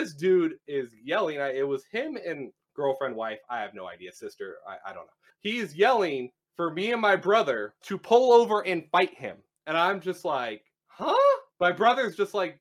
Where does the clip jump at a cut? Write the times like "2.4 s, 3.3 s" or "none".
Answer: none